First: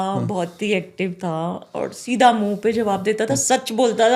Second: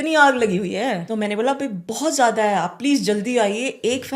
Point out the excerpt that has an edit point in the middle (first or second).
second